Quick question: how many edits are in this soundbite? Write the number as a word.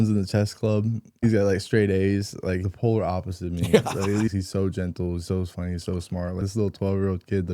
four